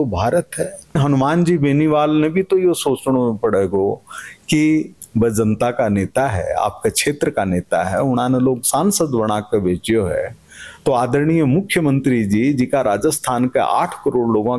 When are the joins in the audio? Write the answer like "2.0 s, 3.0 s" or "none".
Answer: 1.0 s